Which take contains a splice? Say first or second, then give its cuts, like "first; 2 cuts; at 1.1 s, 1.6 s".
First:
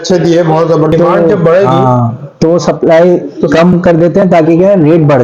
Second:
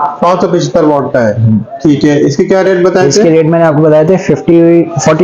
first; 1 cut; at 0.9 s